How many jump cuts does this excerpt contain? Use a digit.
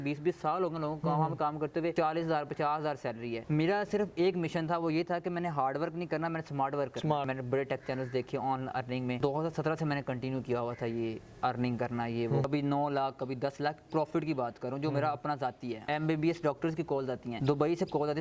7